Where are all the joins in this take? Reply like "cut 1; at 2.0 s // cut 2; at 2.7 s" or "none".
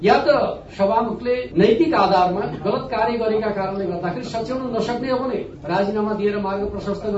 cut 1; at 5.5 s

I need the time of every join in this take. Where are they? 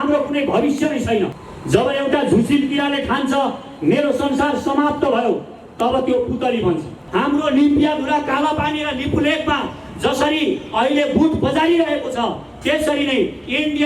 cut 1; at 1.5 s // cut 2; at 7.1 s

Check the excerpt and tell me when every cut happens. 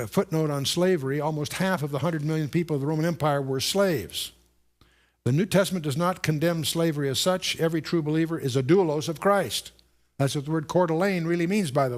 cut 1; at 10.3 s

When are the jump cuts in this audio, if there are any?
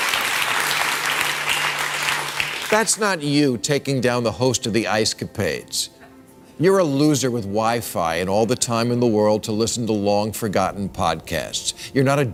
none

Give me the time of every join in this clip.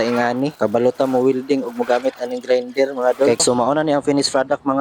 cut 1; at 3.4 s

